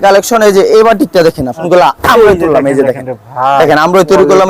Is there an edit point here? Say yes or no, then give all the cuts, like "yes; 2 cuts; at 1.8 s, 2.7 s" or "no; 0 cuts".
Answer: yes; 1 cut; at 1.6 s